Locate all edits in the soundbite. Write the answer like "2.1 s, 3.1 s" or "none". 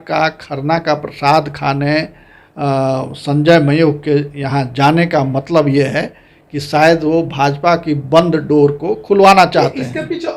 none